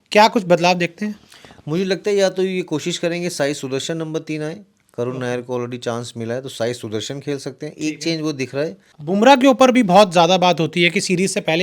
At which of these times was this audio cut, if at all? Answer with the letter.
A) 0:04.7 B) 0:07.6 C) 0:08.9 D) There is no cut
C